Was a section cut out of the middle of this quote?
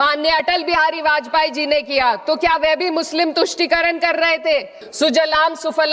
yes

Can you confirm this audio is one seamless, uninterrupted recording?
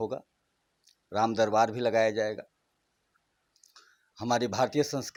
yes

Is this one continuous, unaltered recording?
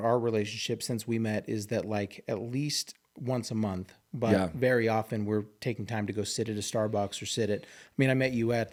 yes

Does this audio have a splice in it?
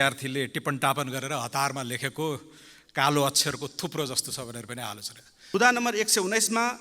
yes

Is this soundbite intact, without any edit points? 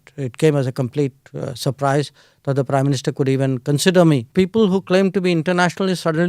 no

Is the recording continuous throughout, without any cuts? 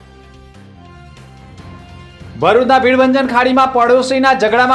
no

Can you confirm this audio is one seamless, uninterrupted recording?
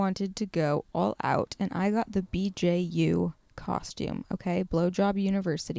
yes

